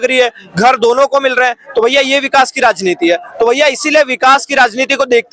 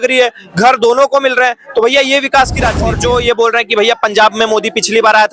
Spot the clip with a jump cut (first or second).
second